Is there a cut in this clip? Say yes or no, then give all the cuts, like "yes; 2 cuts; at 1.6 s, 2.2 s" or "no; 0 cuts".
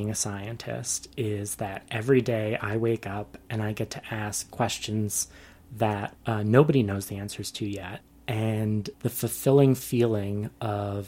yes; 3 cuts; at 6.1 s, 8.1 s, 8.9 s